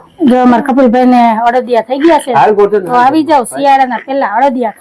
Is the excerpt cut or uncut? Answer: uncut